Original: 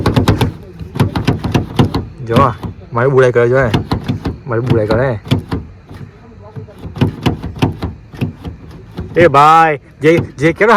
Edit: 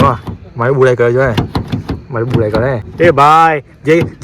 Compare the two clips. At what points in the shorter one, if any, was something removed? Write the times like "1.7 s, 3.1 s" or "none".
2.8 s